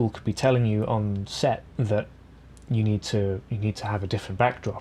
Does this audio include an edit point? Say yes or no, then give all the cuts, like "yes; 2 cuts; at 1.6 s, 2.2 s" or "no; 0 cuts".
no; 0 cuts